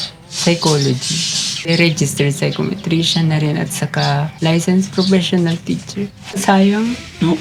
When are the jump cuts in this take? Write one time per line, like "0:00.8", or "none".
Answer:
0:01.7
0:04.3
0:06.3